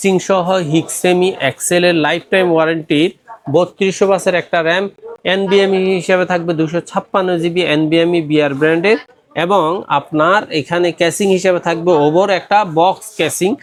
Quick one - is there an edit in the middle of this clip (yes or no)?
no